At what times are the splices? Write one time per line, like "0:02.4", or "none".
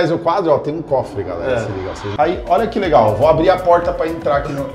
0:01.8